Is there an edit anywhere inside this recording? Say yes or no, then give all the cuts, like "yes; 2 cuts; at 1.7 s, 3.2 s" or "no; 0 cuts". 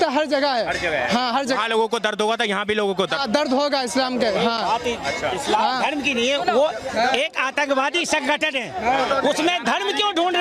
no; 0 cuts